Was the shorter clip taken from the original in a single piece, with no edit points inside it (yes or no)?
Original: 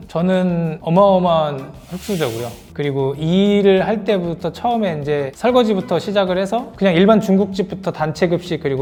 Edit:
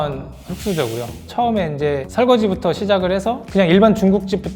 no